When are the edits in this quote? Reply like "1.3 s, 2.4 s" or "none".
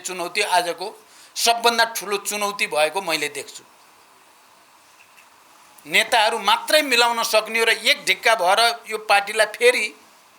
none